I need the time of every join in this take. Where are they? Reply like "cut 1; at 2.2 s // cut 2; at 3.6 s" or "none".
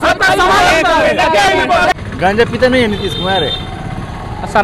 cut 1; at 1.9 s